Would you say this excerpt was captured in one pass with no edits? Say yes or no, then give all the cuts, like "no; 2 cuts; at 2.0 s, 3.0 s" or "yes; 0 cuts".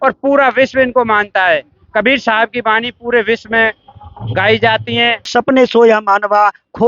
no; 1 cut; at 5.3 s